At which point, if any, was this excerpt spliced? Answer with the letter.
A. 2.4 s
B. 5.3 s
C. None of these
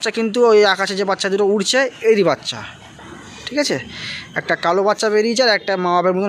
C